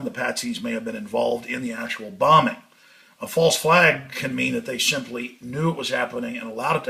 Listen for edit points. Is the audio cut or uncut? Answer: cut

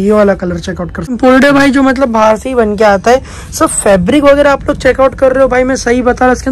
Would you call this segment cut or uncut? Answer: cut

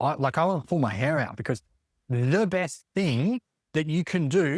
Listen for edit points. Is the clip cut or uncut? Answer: uncut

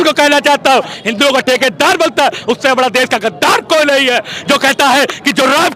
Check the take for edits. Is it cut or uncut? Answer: cut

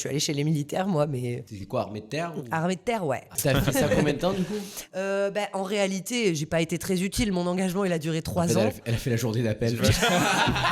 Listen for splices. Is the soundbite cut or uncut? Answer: cut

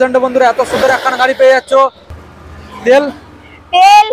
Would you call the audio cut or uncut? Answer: cut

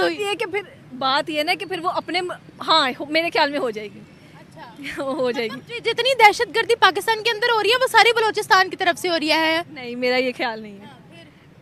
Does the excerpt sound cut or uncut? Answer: uncut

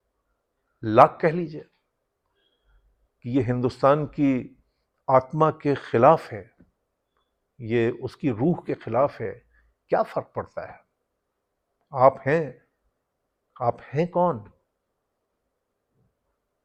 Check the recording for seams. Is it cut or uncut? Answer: uncut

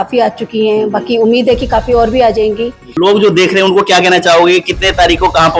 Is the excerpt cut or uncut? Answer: cut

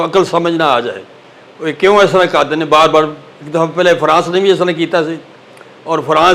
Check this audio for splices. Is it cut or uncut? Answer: uncut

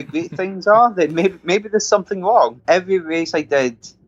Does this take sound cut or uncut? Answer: cut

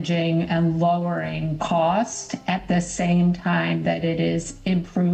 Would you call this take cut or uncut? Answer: uncut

